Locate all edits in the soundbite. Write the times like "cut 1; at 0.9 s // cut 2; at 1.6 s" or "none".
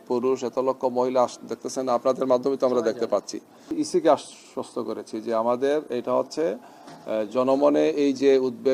cut 1; at 3.7 s